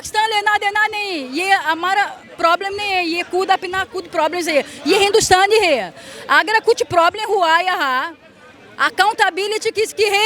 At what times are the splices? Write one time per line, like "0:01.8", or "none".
none